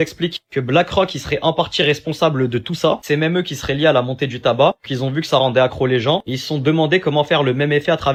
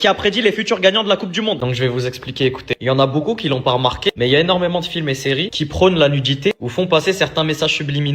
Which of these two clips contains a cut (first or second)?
second